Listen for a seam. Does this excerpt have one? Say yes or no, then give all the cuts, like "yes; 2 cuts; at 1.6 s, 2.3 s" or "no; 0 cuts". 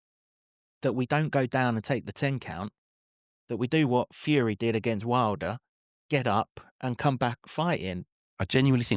yes; 1 cut; at 8.0 s